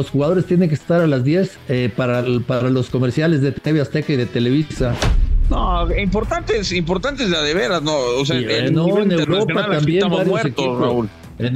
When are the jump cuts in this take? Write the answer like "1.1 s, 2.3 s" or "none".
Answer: 1.6 s, 5.4 s